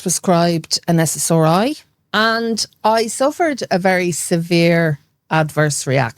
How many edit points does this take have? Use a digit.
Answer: 1